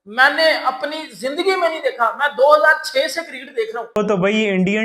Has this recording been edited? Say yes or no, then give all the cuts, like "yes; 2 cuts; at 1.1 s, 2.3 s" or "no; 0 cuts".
yes; 1 cut; at 3.8 s